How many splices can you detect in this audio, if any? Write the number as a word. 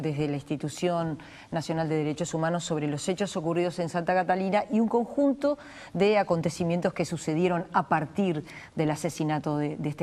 one